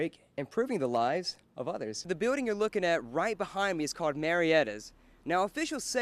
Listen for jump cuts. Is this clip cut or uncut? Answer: cut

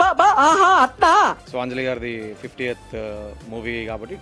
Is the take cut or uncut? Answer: uncut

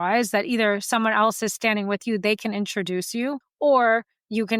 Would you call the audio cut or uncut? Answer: cut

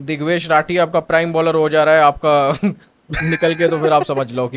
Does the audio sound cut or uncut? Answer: uncut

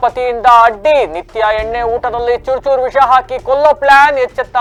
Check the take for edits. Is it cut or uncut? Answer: uncut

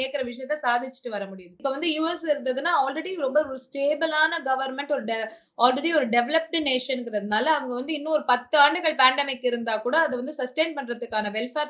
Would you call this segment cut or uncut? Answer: cut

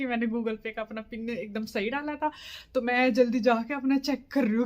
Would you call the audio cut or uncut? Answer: uncut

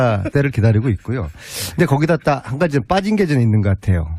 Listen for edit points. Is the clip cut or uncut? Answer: cut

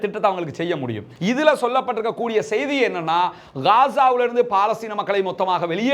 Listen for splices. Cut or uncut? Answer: cut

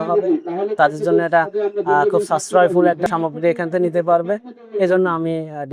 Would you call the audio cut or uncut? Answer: cut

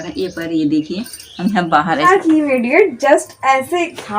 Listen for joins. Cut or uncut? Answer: cut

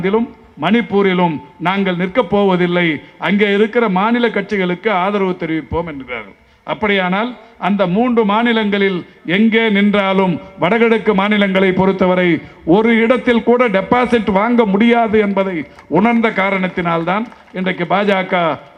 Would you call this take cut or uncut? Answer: uncut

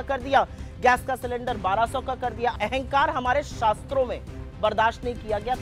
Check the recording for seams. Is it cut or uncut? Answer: cut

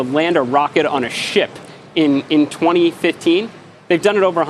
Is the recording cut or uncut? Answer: uncut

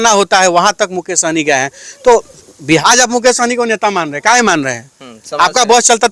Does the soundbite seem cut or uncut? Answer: cut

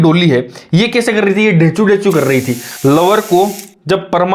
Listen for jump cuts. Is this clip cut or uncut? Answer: cut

